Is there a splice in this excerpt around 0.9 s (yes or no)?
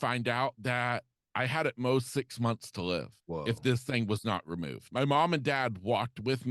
no